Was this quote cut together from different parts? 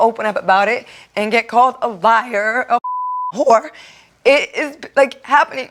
no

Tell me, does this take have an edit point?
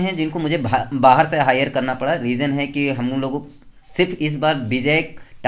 no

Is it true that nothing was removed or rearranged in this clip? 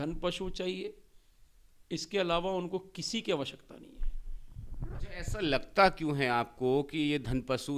yes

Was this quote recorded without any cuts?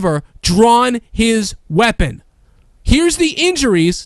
yes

